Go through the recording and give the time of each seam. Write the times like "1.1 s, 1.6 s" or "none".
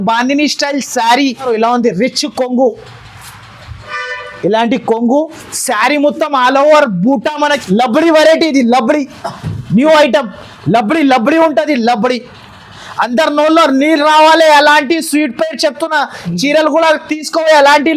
1.4 s, 7.6 s